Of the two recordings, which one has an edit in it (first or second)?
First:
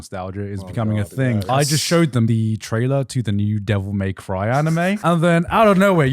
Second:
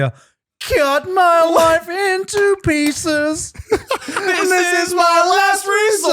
first